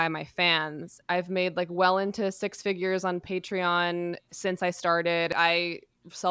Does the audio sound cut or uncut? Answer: cut